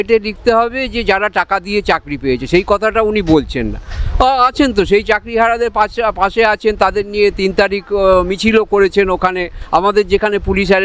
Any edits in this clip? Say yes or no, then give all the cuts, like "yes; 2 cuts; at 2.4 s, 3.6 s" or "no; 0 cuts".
no; 0 cuts